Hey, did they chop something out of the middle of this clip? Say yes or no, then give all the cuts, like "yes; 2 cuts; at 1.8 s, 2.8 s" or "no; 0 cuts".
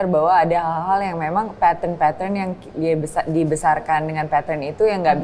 no; 0 cuts